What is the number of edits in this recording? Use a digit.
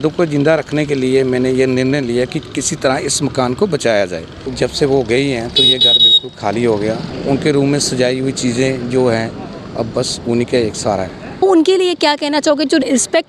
3